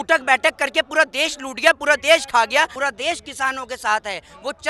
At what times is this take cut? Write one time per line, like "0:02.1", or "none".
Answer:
0:02.7